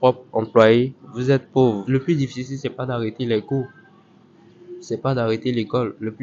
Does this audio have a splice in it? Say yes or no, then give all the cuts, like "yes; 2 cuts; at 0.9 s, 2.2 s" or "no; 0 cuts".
yes; 1 cut; at 1.8 s